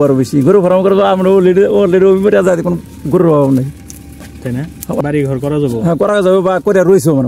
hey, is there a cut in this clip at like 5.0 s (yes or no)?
yes